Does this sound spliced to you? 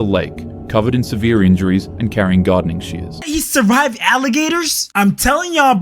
yes; 1 cut; at 3.3 s

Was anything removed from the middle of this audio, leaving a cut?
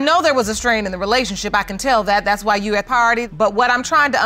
no; 0 cuts

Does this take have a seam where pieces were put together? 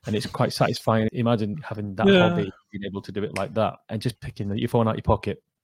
yes; 1 cut; at 1.1 s

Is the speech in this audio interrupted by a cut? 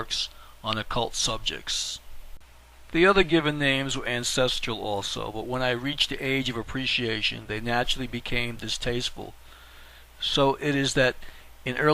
yes; 1 cut; at 2.7 s

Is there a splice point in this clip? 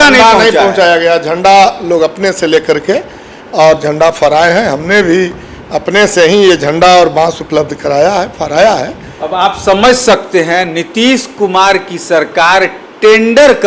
no; 0 cuts

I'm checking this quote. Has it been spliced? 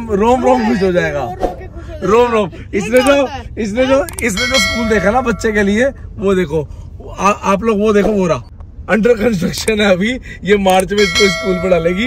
no; 0 cuts

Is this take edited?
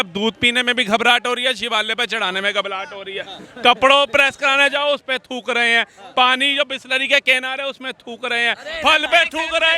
no; 0 cuts

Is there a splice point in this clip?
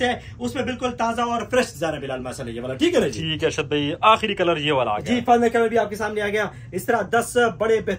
no; 0 cuts

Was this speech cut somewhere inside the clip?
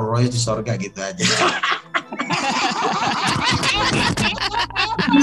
no; 0 cuts

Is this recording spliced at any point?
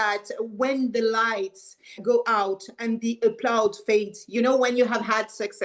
yes; 1 cut; at 2.0 s

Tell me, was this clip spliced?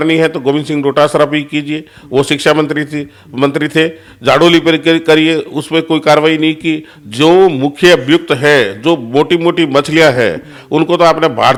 no; 0 cuts

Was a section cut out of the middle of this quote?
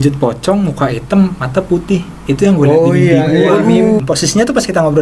yes; 1 cut; at 4.0 s

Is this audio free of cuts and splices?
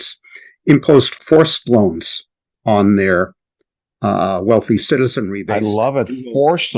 no; 1 cut; at 1.2 s

